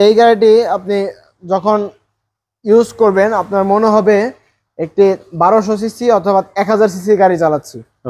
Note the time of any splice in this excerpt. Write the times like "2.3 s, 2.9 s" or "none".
none